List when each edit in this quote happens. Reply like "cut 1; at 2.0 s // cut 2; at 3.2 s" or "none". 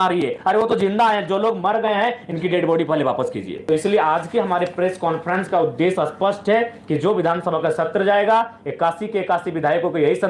cut 1; at 3.4 s

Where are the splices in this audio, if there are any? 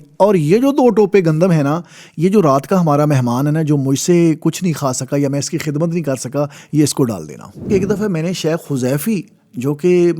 cut 1; at 7.7 s

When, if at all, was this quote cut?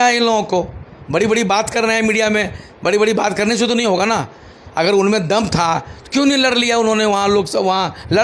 none

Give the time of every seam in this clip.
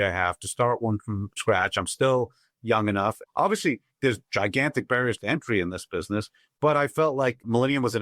none

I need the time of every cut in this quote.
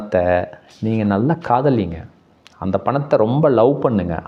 none

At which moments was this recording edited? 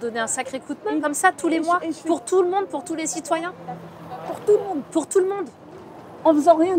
cut 1; at 1.0 s

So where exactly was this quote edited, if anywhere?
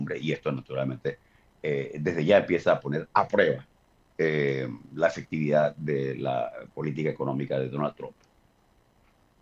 none

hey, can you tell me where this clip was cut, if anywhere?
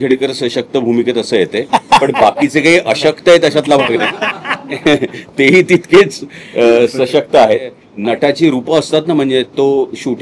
none

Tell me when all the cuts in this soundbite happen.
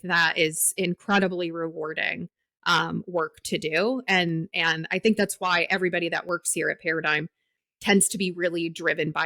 cut 1; at 7.6 s

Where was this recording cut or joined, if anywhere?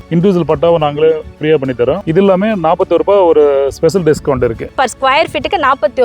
cut 1; at 4.8 s

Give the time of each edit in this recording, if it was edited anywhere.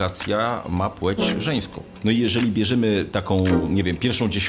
cut 1; at 1.8 s

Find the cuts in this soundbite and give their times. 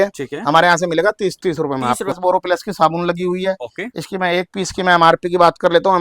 cut 1; at 2.1 s

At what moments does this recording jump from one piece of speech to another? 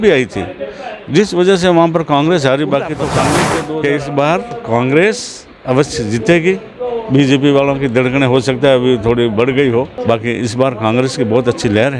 cut 1; at 3.5 s // cut 2; at 9.9 s

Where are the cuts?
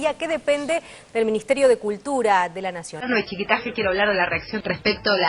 cut 1; at 2.9 s

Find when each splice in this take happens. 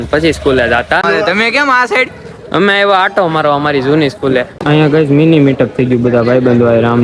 cut 1; at 1.0 s // cut 2; at 4.5 s

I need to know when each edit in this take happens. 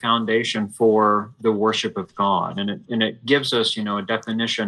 none

